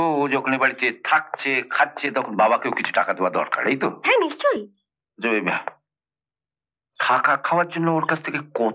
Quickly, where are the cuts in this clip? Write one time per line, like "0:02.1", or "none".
none